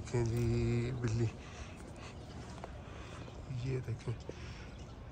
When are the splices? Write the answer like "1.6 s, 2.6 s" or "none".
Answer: none

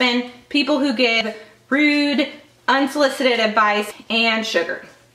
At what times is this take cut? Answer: 1.2 s, 3.9 s

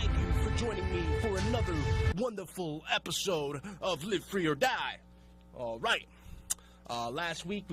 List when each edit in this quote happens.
4.1 s

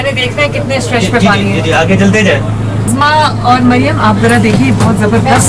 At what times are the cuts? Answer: 2.9 s

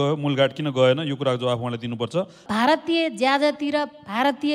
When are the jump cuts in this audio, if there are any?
2.4 s

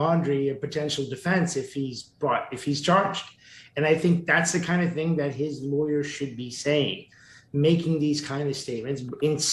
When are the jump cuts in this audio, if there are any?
none

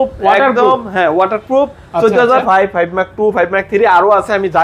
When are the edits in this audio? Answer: 2.4 s

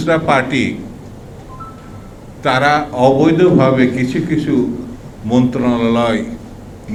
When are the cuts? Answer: none

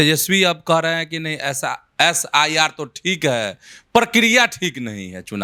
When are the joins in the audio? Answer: none

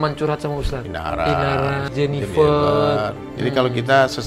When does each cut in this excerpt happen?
0.9 s, 1.9 s, 3.2 s

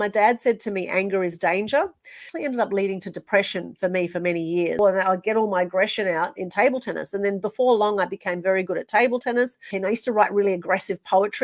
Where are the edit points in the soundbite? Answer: 2.2 s, 4.8 s, 9.7 s

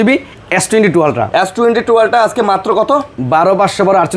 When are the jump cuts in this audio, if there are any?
none

